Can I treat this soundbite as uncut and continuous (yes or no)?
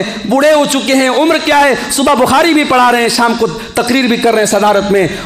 yes